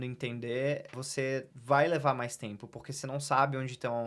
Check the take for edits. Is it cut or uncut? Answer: cut